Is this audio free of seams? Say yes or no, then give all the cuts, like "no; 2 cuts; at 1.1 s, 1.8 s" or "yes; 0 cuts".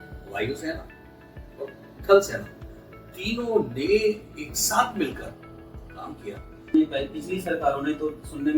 no; 1 cut; at 6.7 s